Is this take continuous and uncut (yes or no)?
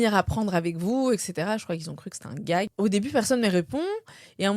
no